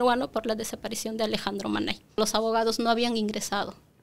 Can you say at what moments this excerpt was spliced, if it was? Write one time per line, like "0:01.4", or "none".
0:02.2